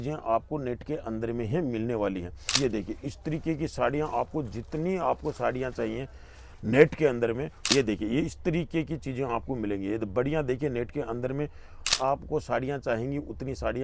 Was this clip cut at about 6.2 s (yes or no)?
no